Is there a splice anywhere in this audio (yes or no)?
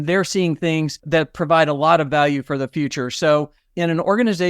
yes